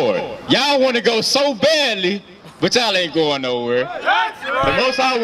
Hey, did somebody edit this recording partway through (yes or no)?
no